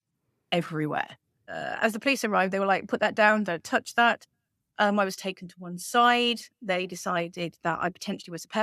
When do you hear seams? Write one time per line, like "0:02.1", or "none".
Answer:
0:01.5